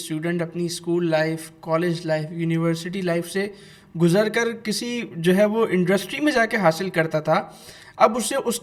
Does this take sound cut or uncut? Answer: uncut